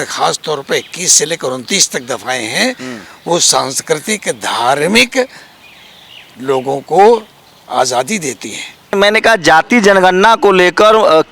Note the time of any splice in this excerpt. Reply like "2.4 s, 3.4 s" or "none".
8.9 s